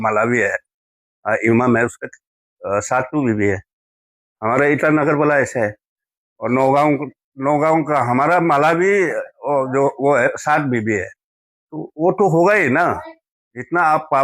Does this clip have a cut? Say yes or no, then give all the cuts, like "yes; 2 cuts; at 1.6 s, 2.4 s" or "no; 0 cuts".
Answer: no; 0 cuts